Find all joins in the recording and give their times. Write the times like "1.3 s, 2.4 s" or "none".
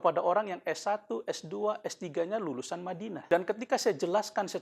3.2 s

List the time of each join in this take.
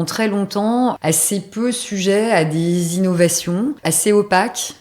1.0 s, 3.8 s

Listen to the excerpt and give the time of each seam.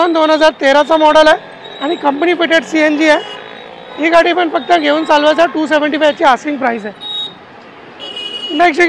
none

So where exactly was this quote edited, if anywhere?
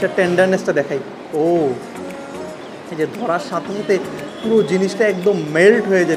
none

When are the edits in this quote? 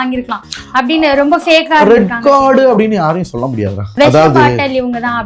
3.9 s

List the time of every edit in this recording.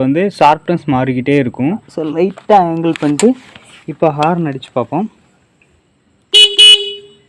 1.9 s

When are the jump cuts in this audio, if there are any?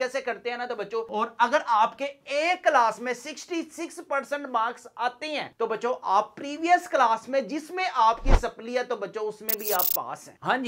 1.1 s

